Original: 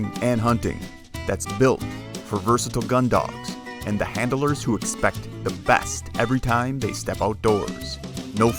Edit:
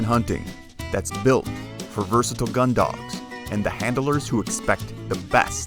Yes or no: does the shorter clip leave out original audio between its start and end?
no